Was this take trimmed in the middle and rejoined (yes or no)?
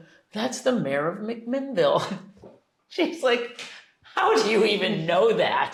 no